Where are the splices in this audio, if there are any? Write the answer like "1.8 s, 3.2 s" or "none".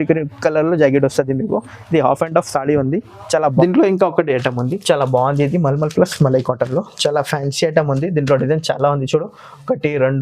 3.6 s

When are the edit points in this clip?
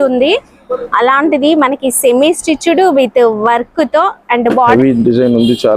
4.7 s

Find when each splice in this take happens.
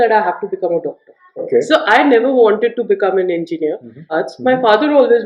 1.4 s, 4.1 s

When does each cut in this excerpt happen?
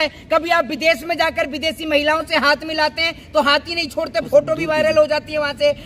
none

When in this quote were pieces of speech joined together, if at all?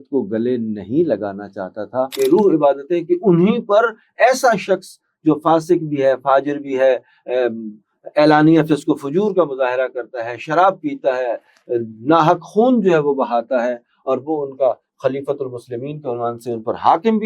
2.1 s

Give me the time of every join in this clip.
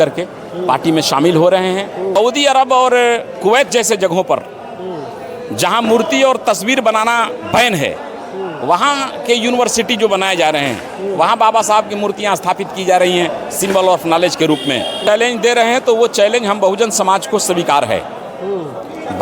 2.1 s, 15.0 s

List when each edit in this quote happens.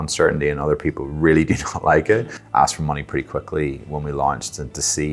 2.4 s

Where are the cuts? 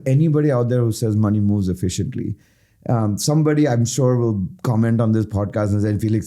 none

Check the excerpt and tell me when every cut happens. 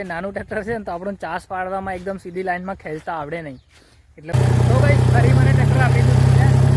4.3 s

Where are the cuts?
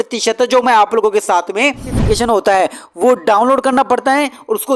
1.9 s

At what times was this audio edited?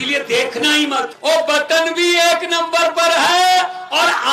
1.1 s

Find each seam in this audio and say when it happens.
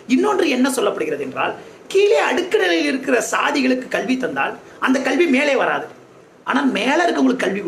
none

